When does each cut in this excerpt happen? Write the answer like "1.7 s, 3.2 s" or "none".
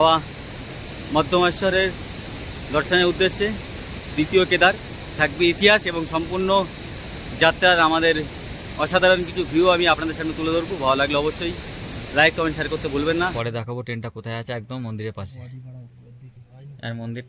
13.3 s